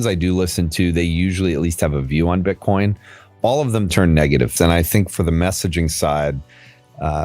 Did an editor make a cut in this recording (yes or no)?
yes